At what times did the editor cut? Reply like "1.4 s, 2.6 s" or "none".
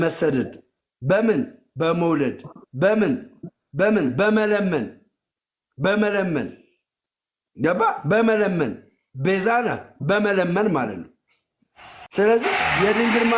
none